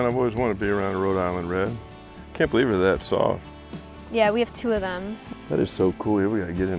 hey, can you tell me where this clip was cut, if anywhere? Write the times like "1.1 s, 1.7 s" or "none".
none